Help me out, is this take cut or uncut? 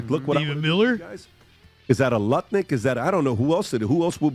uncut